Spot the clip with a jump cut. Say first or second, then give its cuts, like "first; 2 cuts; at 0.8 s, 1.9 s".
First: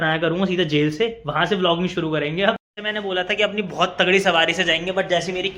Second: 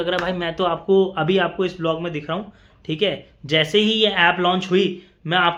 first; 1 cut; at 2.7 s